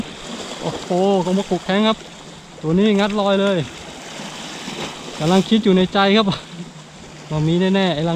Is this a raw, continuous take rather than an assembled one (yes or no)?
yes